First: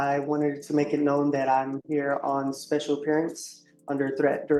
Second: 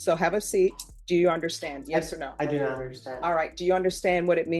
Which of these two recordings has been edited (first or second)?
second